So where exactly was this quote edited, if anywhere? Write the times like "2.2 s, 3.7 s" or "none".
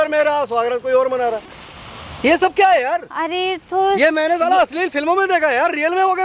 none